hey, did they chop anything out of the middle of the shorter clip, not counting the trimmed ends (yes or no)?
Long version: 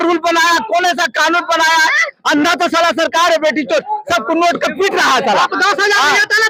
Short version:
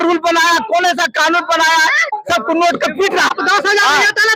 yes